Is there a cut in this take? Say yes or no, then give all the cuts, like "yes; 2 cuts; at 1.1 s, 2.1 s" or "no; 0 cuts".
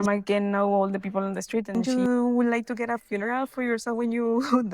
yes; 1 cut; at 1.8 s